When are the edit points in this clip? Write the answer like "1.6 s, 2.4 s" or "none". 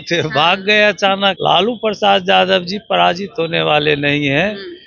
1.4 s

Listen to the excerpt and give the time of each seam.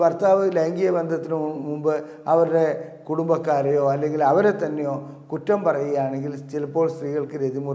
none

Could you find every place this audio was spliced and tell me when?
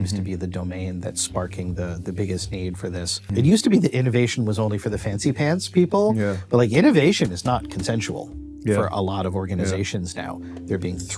3.2 s

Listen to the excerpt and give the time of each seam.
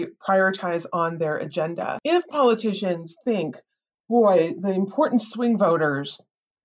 1.9 s

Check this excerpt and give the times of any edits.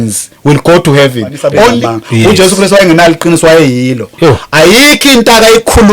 1.7 s

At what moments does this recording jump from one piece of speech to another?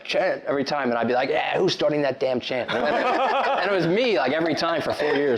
none

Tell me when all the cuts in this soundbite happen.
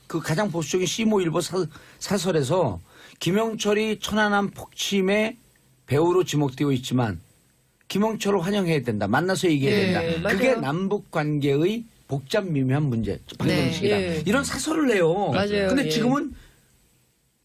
13.2 s

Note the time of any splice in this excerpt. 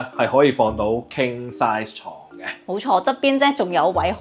none

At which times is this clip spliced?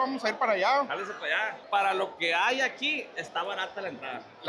1.5 s

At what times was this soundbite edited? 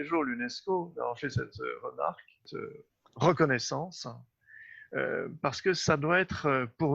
2.5 s

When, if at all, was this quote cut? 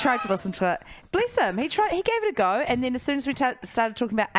none

